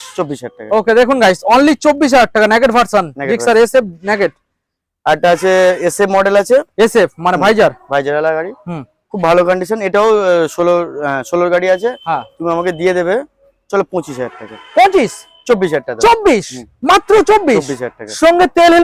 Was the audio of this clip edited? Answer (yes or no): no